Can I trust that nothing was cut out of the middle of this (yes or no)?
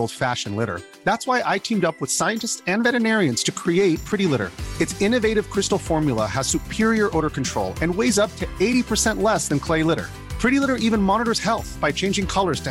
yes